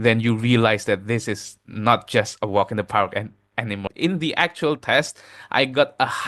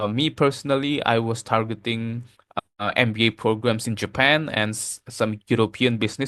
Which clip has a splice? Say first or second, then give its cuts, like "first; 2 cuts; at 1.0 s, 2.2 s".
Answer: first; 1 cut; at 3.9 s